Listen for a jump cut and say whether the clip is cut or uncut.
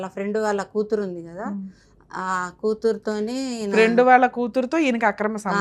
uncut